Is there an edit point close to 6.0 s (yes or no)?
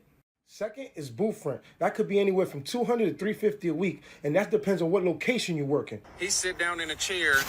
yes